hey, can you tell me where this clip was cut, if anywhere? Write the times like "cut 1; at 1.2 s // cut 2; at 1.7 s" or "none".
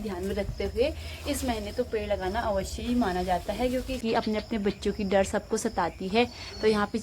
cut 1; at 4.0 s

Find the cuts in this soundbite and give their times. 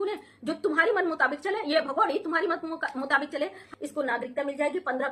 cut 1; at 3.6 s

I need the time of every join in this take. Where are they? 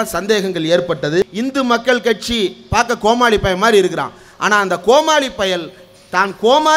cut 1; at 1.3 s

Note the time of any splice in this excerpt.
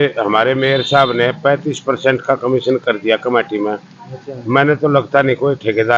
none

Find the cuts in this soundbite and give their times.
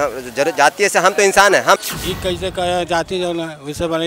cut 1; at 1.8 s

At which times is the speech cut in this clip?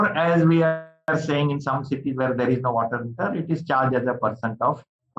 cut 1; at 0.9 s

